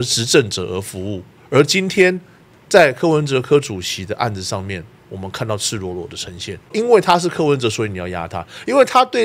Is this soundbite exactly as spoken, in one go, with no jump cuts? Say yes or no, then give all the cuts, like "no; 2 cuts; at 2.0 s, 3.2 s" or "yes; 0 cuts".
no; 1 cut; at 6.7 s